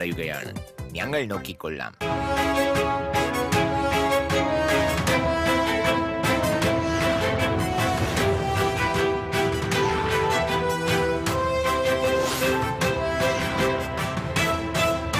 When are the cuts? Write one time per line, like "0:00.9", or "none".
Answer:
0:01.9